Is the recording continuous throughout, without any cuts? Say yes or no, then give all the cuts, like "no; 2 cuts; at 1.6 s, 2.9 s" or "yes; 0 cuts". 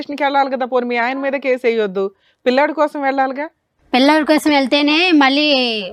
yes; 0 cuts